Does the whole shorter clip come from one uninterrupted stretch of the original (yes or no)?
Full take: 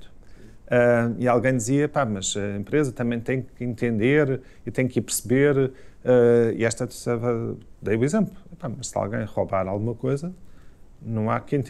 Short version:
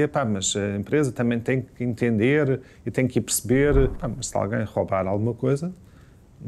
no